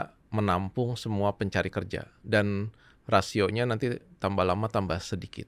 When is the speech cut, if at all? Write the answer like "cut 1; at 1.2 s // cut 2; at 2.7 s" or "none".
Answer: none

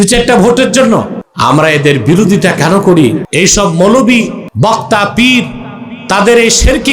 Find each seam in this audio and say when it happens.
cut 1; at 1.2 s // cut 2; at 3.2 s // cut 3; at 4.4 s

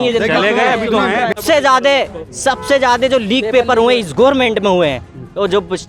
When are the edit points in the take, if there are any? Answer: cut 1; at 1.3 s

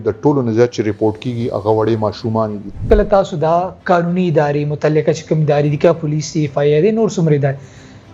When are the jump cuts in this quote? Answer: cut 1; at 2.8 s

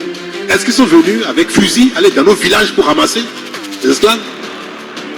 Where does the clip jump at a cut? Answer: cut 1; at 4.2 s

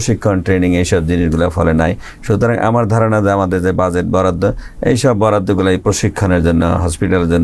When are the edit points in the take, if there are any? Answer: none

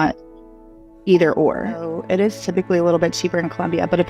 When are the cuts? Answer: cut 1; at 1.9 s

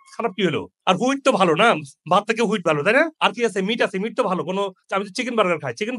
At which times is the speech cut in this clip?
none

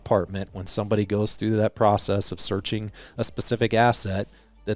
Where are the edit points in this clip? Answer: cut 1; at 3.0 s

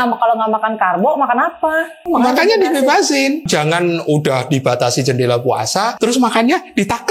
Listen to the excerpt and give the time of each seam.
cut 1; at 2.0 s // cut 2; at 3.4 s // cut 3; at 5.9 s

